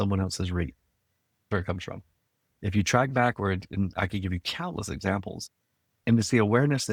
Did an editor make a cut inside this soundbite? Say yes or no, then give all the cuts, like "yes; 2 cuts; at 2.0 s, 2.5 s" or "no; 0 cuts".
no; 0 cuts